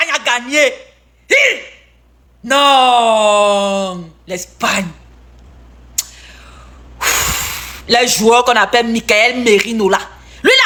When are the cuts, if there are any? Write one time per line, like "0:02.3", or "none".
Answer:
none